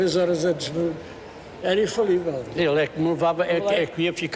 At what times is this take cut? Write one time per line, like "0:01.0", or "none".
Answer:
none